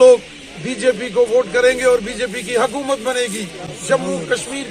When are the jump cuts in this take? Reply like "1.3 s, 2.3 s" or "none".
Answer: none

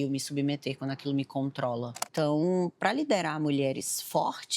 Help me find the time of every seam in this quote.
2.0 s

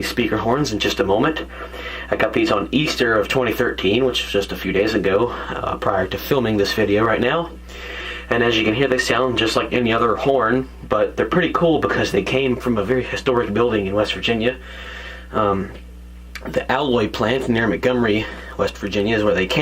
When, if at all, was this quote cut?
8.6 s

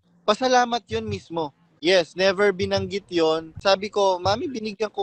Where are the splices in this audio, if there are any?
1.7 s

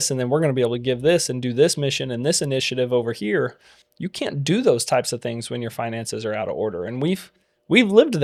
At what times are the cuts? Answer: none

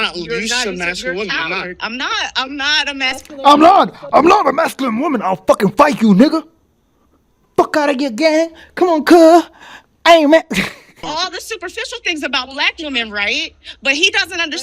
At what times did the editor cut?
11.0 s

